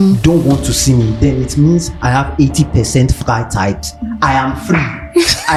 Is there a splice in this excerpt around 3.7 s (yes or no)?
no